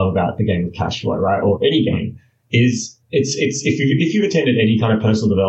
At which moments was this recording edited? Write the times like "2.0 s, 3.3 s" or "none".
none